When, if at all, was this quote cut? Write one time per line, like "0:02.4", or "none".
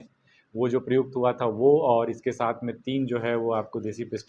none

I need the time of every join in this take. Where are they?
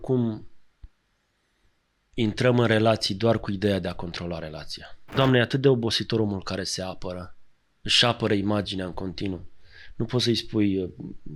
0:05.1

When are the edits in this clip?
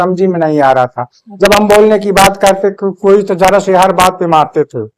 none

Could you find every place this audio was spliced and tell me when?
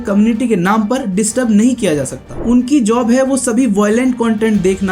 0:02.3

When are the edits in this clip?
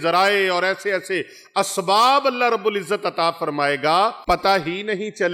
0:04.2

